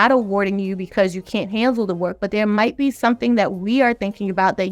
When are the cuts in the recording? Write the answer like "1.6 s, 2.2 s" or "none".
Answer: none